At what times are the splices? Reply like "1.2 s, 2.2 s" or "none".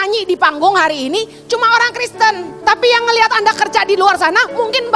2.5 s